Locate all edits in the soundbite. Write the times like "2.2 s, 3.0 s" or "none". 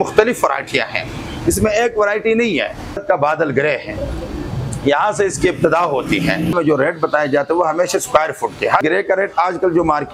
3.0 s, 6.5 s, 8.8 s